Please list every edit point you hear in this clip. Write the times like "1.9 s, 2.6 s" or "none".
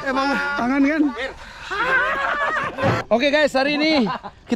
3.0 s